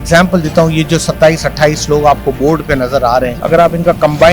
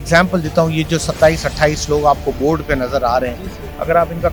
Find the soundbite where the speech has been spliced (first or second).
first